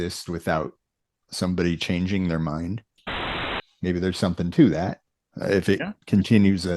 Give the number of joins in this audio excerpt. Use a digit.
1